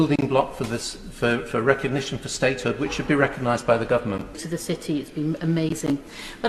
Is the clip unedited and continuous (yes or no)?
no